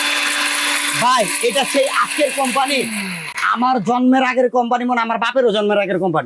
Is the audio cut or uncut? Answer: uncut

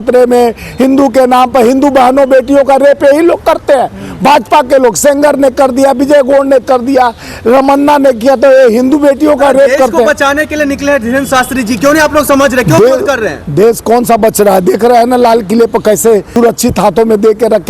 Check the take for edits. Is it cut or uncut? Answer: uncut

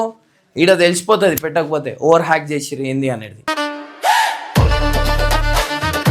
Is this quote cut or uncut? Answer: uncut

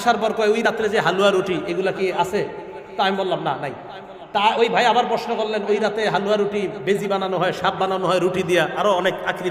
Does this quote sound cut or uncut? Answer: uncut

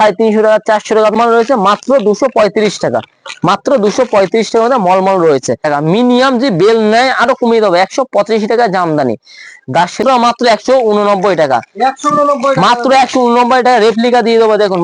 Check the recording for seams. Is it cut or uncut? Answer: cut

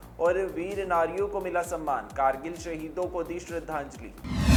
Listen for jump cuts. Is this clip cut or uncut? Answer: uncut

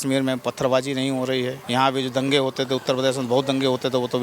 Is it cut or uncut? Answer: cut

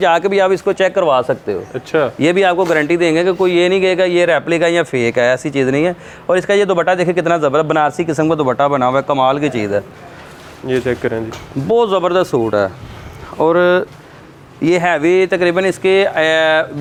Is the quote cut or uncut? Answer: uncut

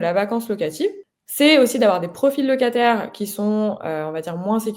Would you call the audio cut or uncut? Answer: cut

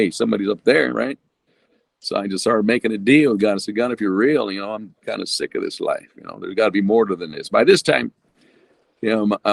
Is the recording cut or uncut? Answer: uncut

